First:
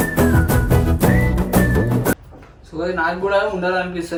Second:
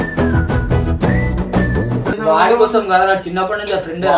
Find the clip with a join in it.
second; 1 cut; at 2.2 s

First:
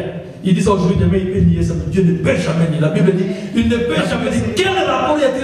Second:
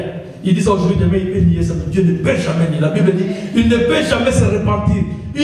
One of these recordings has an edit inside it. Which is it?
first; 1 cut; at 4.1 s

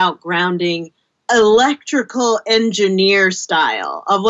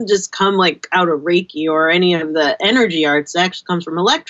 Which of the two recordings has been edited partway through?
first; 1 cut; at 1.1 s

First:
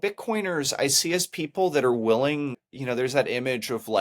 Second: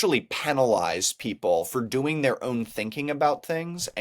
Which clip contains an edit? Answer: first; 1 cut; at 2.7 s

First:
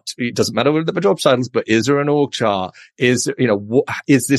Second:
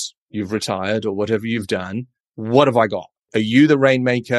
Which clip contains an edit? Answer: second; 1 cut; at 3.2 s

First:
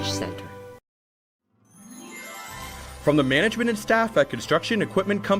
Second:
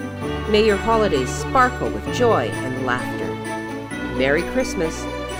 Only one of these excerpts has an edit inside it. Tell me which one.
first; 1 cut; at 1.4 s

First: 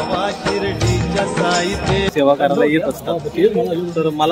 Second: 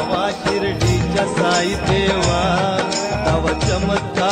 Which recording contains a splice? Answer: first; 1 cut; at 2.1 s

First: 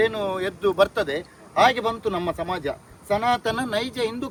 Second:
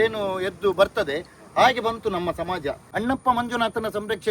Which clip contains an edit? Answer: second; 1 cut; at 2.8 s

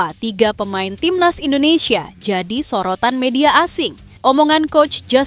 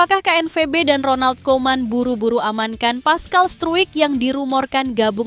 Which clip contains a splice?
first; 1 cut; at 4.0 s

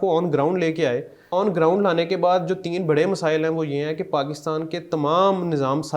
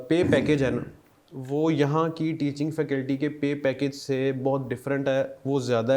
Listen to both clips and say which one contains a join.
first; 1 cut; at 1.2 s

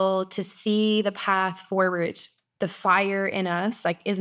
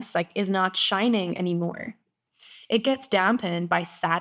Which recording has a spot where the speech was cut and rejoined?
second; 1 cut; at 2.2 s

